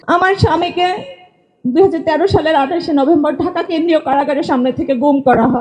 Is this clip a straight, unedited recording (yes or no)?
yes